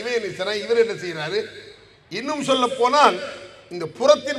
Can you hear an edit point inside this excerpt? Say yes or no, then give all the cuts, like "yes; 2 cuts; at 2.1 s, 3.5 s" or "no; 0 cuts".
no; 0 cuts